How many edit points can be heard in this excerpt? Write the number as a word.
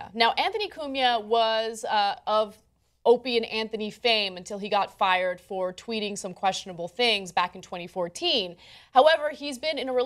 one